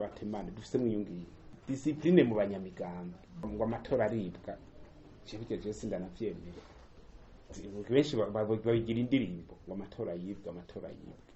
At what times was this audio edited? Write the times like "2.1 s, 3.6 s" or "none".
1.5 s, 3.5 s